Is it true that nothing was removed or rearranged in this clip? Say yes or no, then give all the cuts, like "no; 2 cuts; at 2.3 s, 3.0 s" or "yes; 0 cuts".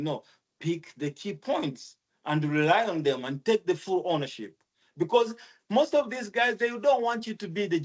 yes; 0 cuts